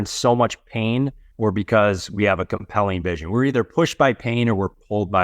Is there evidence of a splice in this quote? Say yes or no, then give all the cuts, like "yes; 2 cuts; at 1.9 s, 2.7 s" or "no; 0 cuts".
yes; 1 cut; at 1.2 s